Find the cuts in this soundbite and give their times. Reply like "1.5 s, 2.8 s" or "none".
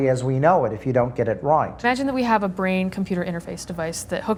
none